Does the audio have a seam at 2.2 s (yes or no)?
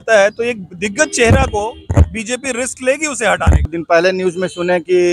no